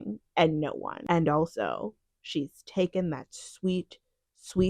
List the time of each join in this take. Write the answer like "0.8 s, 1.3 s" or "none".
1.0 s